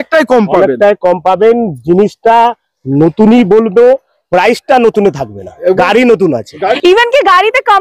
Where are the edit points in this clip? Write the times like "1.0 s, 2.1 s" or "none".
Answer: 6.8 s